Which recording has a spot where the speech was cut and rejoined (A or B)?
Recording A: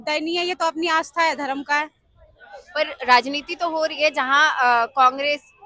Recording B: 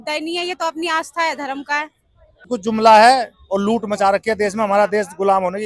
B